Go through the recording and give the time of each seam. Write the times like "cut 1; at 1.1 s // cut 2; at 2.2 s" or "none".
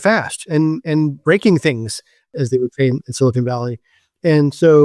cut 1; at 2.3 s